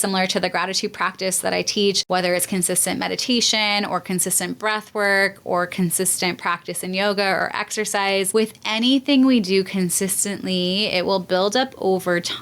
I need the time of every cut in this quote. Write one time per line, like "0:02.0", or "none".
0:02.0
0:08.3